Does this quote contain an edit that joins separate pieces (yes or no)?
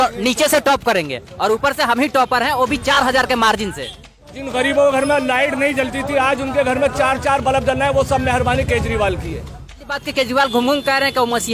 yes